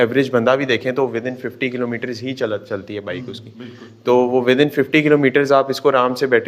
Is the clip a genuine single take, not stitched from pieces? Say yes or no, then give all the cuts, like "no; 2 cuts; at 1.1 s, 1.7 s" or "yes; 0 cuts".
yes; 0 cuts